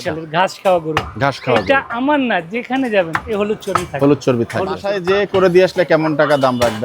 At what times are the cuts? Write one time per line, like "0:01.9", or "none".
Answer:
0:04.9